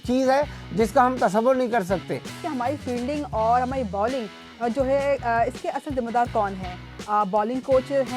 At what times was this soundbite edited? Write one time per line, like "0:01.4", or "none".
0:02.3